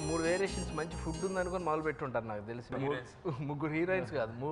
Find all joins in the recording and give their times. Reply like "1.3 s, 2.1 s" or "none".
2.7 s